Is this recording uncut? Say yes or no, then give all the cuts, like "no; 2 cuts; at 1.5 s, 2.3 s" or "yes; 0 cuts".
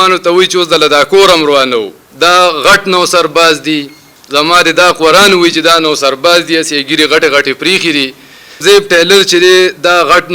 no; 2 cuts; at 2.0 s, 8.6 s